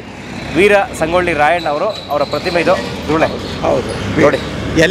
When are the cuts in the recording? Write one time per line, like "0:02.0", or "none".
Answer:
none